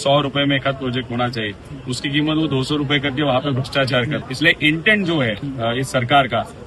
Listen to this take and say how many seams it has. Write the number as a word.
two